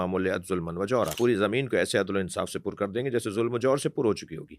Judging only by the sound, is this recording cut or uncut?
cut